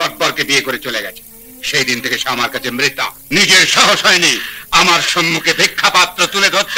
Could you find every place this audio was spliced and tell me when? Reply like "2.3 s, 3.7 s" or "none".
3.2 s